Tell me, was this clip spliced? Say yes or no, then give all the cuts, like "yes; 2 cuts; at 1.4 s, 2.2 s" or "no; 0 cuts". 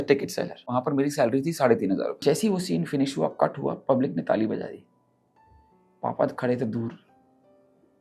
yes; 2 cuts; at 0.7 s, 2.2 s